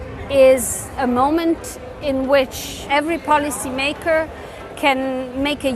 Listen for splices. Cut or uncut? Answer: cut